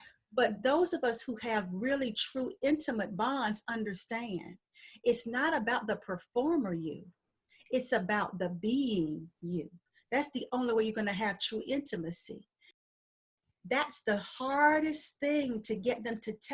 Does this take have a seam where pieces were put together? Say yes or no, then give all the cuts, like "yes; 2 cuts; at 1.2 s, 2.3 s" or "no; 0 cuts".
yes; 1 cut; at 12.9 s